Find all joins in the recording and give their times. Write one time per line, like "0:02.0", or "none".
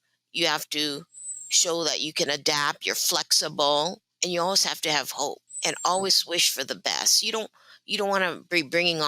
0:04.1
0:05.5